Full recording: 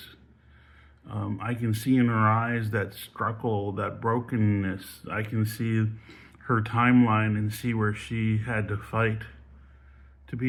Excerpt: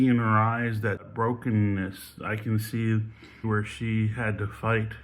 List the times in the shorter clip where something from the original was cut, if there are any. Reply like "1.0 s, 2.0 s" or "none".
1.1 s, 3.3 s

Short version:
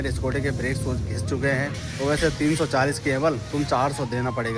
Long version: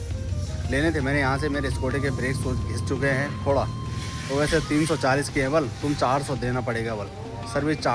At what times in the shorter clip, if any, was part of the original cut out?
1.7 s

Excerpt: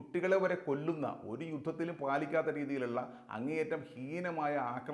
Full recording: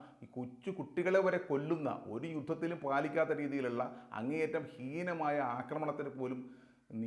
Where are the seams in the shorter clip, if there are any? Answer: none

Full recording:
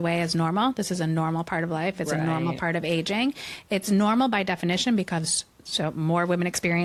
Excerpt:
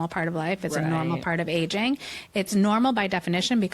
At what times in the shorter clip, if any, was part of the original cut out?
none

